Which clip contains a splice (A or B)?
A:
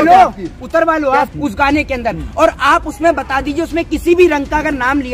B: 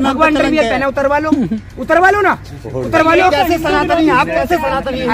A